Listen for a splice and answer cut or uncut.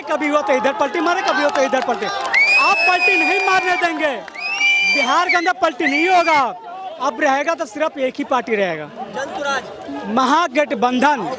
uncut